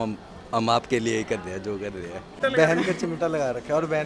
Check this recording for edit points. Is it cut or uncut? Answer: cut